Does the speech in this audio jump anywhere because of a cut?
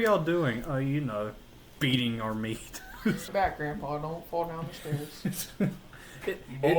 yes; 1 cut; at 3.3 s

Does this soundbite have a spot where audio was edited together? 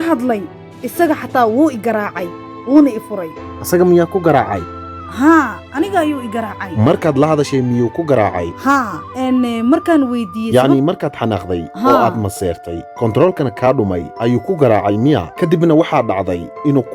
no; 0 cuts

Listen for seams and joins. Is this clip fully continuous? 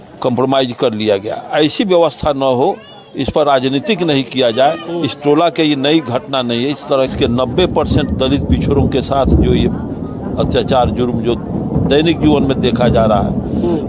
no; 1 cut; at 7.1 s

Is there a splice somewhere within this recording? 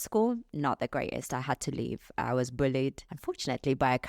yes; 1 cut; at 3.1 s

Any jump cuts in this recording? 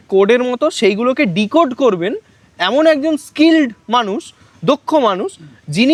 no; 0 cuts

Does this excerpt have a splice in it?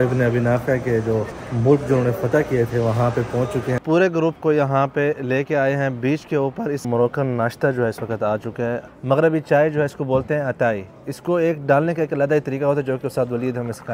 yes; 4 cuts; at 1.4 s, 3.8 s, 6.9 s, 8.9 s

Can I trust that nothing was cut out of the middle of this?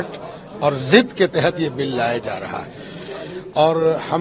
yes; 0 cuts

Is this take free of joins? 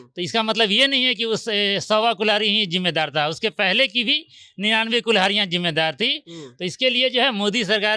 yes; 0 cuts

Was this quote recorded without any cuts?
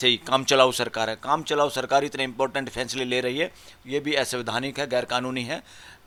yes; 0 cuts

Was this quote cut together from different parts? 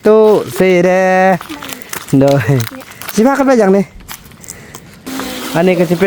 yes; 1 cut; at 5.1 s

